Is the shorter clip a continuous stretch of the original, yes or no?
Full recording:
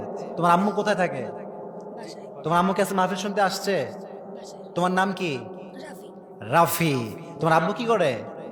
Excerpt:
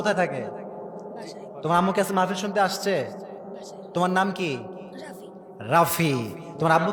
yes